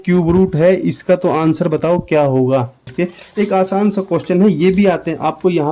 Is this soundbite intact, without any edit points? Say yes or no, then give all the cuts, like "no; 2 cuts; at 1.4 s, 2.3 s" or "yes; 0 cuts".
no; 1 cut; at 2.9 s